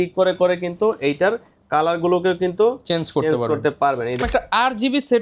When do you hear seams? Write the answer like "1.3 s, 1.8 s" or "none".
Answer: 4.2 s